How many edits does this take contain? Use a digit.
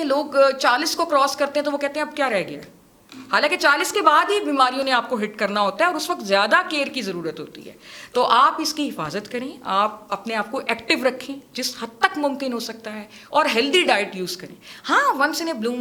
0